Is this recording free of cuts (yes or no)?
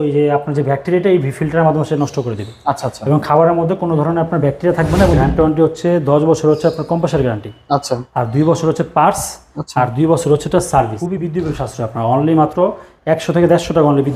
no